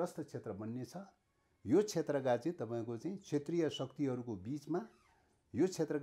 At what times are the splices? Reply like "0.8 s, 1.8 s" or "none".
none